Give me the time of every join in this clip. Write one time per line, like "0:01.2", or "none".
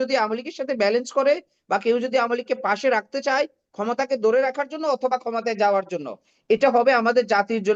none